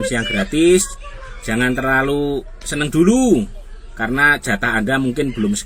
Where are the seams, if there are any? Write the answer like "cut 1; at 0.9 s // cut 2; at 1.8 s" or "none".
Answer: none